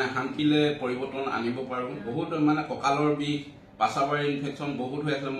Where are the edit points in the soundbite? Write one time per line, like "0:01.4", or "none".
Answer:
0:02.0